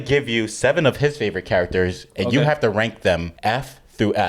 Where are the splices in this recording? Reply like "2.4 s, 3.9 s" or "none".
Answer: 3.3 s